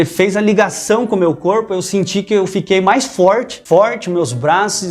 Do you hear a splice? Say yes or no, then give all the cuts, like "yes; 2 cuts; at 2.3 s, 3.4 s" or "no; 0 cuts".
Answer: yes; 1 cut; at 3.6 s